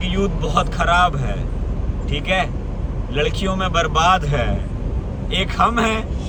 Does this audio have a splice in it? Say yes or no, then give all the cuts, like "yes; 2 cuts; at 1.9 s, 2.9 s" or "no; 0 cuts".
no; 0 cuts